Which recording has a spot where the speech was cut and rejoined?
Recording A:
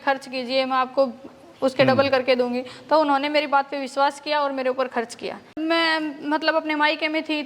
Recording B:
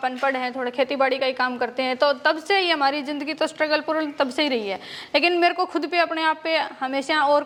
A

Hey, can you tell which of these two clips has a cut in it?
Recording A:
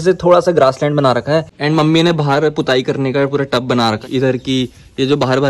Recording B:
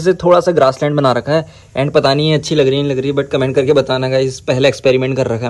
A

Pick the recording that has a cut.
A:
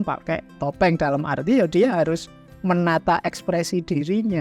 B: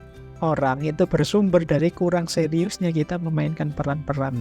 B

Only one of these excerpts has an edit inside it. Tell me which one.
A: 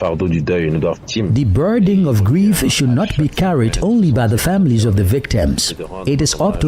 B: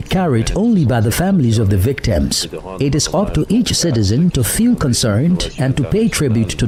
A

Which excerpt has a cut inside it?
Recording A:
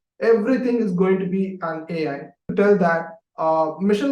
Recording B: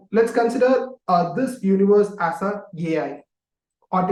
A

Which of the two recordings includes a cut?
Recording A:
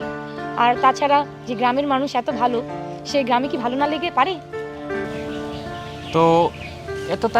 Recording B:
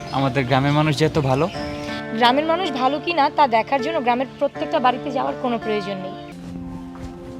B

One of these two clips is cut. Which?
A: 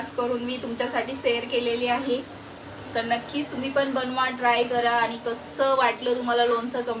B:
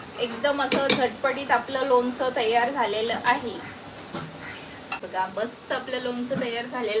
B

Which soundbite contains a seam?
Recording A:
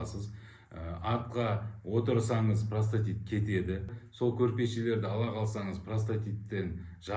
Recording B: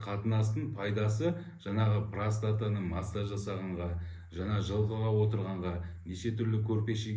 A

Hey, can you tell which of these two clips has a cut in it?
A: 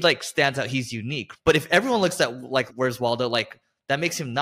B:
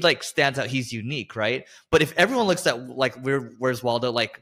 A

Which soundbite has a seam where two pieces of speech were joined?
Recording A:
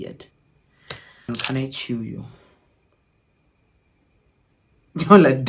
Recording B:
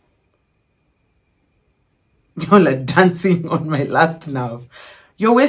A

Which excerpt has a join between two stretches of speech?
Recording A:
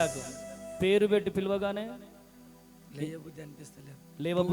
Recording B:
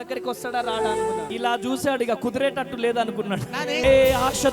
B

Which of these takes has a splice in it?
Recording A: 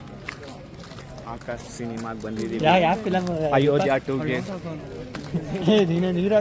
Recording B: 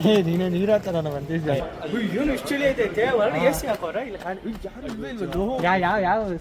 B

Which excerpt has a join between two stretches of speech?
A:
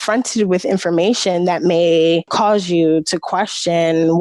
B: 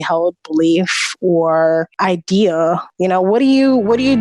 B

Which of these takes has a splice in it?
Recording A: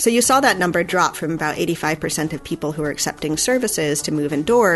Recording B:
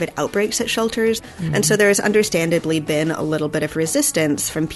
B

